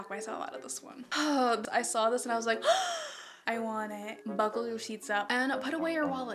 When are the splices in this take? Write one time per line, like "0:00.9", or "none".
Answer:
0:01.0
0:01.6
0:04.2